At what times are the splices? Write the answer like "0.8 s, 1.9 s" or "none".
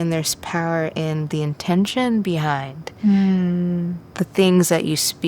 4.0 s

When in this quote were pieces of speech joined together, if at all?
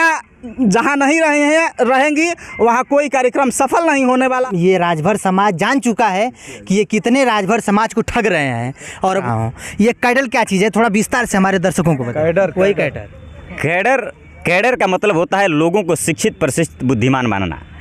4.4 s, 9.1 s

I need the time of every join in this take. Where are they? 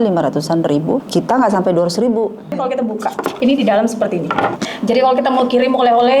1.1 s, 2.8 s, 4.7 s

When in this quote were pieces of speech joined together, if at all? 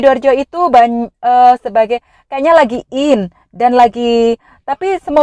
none

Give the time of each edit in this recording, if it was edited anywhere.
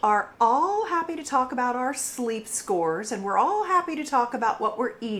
none

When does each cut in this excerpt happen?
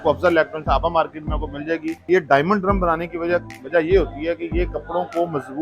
2.0 s

